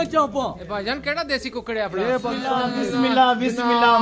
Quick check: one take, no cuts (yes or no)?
no